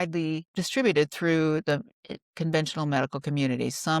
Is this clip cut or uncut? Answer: uncut